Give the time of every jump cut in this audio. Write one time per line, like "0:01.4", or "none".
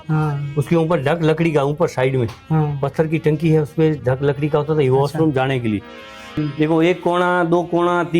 0:06.4